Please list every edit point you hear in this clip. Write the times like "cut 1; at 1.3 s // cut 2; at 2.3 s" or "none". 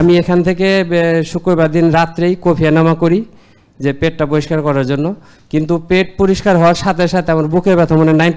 none